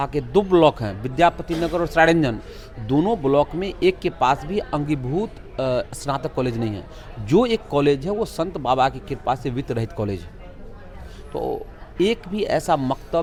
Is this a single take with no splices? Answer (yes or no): yes